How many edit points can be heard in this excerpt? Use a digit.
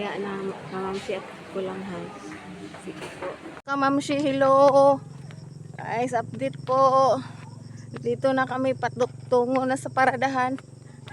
1